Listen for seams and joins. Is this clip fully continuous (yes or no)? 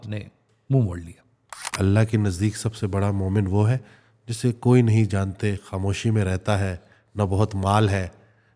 no